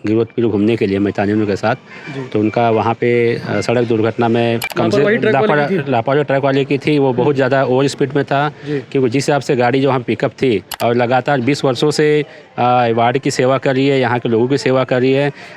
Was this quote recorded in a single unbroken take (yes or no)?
no